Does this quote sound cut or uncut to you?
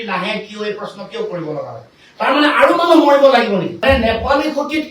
cut